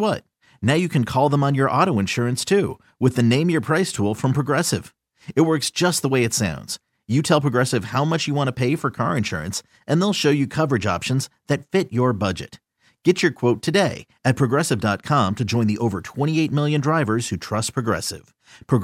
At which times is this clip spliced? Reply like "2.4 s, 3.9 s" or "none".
none